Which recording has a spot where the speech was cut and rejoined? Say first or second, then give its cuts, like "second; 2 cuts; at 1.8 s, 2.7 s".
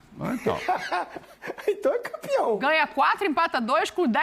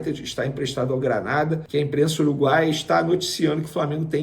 second; 1 cut; at 1.6 s